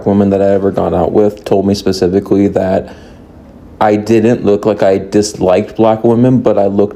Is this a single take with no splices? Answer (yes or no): yes